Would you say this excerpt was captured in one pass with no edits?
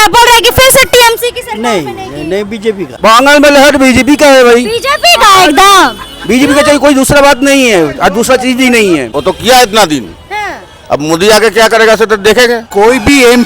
no; 3 cuts; at 2.9 s, 9.1 s, 12.6 s

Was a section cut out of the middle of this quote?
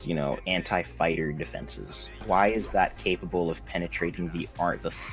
yes; 1 cut; at 2.2 s

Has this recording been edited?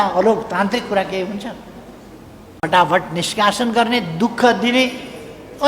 no; 0 cuts

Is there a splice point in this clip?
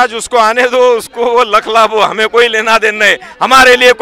no; 0 cuts

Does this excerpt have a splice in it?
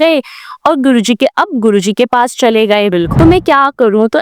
yes; 1 cut; at 3.1 s

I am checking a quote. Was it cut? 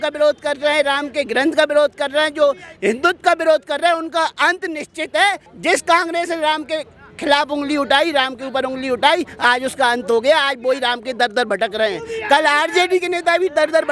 yes; 1 cut; at 5.5 s

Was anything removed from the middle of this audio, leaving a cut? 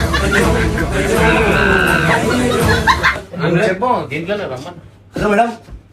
yes; 1 cut; at 3.2 s

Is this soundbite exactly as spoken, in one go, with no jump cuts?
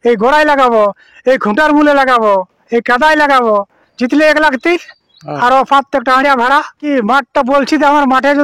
no; 2 cuts; at 3.8 s, 6.8 s

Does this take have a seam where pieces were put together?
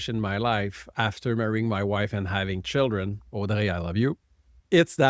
no; 0 cuts

